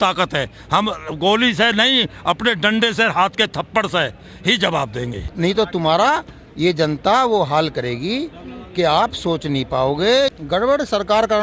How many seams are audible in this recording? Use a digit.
2